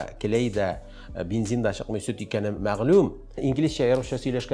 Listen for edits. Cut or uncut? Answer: cut